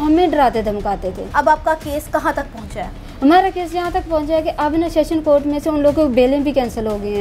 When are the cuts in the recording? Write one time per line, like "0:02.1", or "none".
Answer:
none